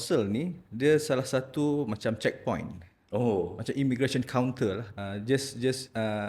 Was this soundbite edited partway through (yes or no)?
yes